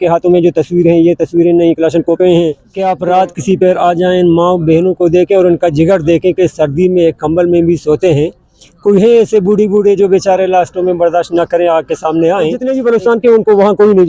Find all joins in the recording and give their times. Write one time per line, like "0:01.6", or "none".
0:02.7
0:12.6

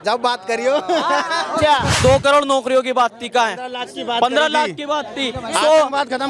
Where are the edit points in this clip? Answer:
0:01.9

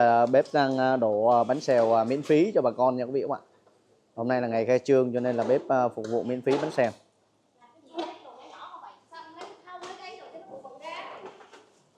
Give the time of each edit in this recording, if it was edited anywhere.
none

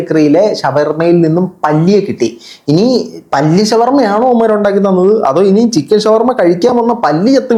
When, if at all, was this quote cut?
none

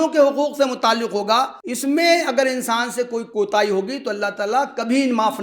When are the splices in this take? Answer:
0:01.6
0:03.2

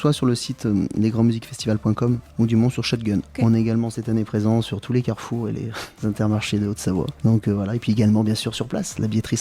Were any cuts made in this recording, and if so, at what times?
0:05.8
0:07.1

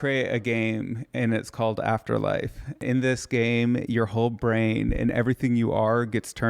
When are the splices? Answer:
0:02.8

